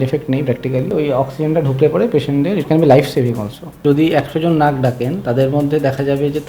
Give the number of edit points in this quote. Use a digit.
2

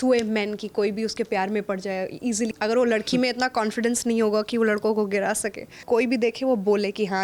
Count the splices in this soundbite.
2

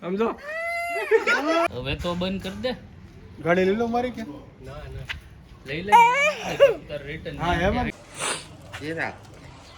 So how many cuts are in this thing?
2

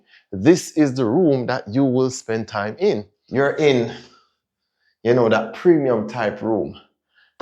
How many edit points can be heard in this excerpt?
1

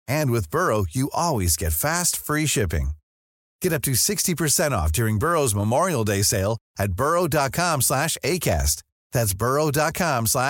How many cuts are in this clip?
0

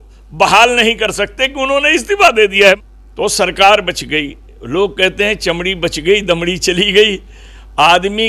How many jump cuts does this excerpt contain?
1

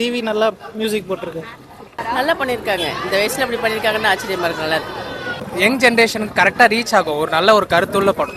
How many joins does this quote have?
2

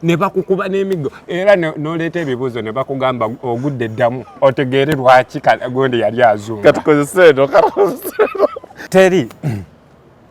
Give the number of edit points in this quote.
1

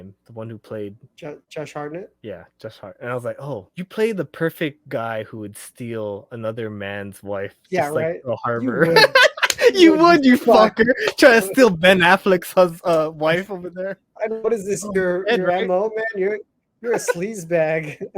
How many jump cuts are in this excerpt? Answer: 3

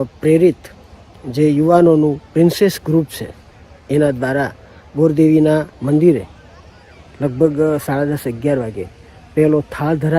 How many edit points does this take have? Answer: 1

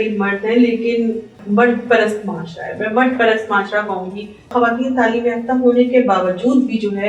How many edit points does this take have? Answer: 2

